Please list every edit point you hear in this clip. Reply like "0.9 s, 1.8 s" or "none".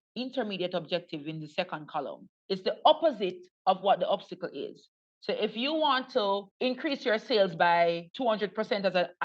2.3 s, 6.5 s, 8.1 s